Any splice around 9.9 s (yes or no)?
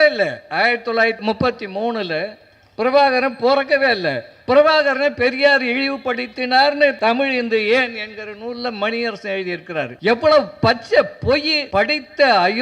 yes